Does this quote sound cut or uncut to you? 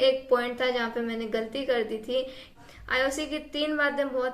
cut